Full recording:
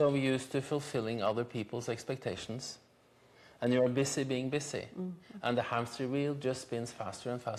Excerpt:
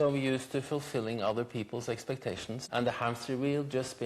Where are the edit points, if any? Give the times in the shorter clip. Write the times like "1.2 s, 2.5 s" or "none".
2.6 s